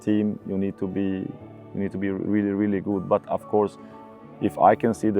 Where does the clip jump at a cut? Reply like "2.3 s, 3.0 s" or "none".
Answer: none